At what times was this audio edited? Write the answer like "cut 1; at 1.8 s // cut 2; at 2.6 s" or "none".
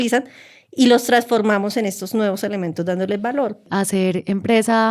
cut 1; at 3.6 s